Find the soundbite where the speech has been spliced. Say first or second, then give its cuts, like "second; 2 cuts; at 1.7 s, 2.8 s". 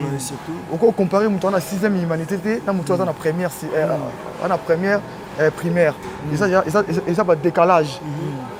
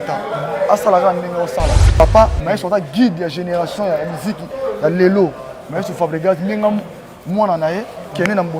second; 1 cut; at 2.0 s